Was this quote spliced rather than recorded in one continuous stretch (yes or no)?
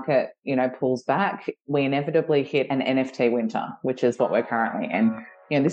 yes